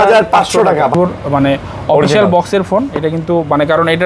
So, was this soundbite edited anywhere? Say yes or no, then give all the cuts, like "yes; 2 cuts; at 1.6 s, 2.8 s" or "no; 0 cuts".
yes; 1 cut; at 0.9 s